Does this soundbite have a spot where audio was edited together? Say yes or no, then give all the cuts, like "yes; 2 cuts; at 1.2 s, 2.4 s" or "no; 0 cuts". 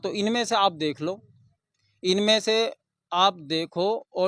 no; 0 cuts